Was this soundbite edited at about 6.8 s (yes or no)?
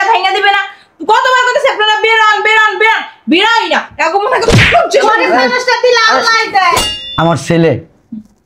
yes